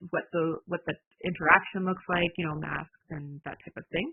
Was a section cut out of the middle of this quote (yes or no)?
no